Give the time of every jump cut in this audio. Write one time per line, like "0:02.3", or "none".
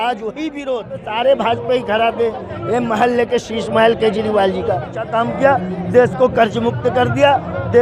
0:01.1
0:05.0